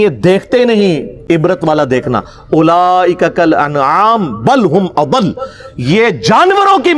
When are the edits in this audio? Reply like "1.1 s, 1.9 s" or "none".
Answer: none